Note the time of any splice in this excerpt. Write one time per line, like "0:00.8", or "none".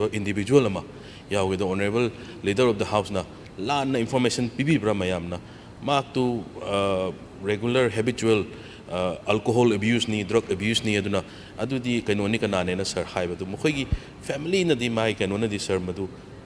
none